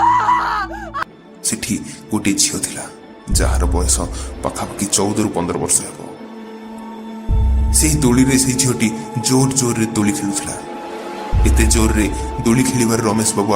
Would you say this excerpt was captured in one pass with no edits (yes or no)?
no